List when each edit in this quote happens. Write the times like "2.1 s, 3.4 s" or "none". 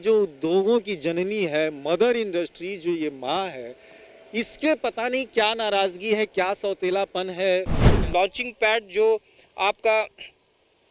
7.9 s